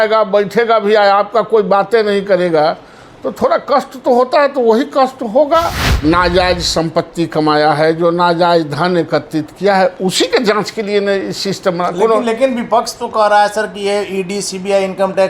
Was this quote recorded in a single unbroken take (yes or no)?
no